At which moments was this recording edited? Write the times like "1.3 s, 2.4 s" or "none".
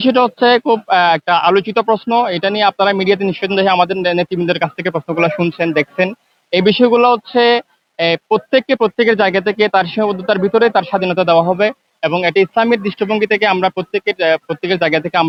none